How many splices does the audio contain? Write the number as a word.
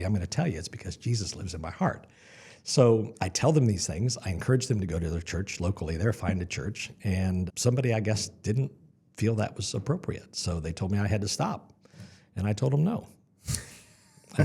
two